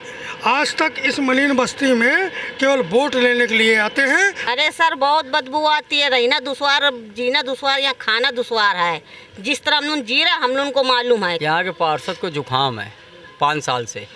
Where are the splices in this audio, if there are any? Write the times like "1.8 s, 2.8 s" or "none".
4.4 s, 11.4 s